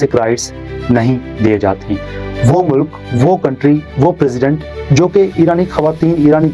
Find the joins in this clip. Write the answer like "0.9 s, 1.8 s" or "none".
2.1 s